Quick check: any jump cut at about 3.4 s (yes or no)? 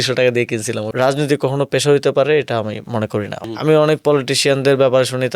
yes